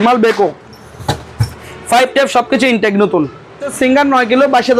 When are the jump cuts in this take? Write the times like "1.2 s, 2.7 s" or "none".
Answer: 3.7 s